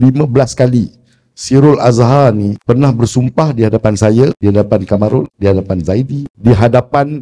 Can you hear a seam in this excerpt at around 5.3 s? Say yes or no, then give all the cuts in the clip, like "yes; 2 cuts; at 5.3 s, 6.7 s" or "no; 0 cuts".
yes; 4 cuts; at 2.6 s, 4.4 s, 5.3 s, 6.2 s